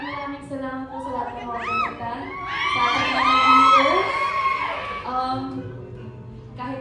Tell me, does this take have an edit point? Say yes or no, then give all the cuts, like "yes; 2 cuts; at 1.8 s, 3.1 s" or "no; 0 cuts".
no; 0 cuts